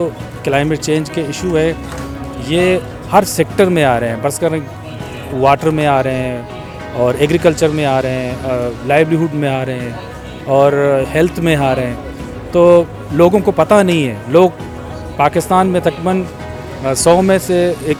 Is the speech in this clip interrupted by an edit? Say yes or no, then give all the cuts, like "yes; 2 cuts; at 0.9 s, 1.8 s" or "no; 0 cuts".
no; 0 cuts